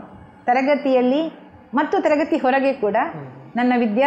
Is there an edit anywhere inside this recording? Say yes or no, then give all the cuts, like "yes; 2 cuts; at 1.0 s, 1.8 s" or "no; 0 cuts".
no; 0 cuts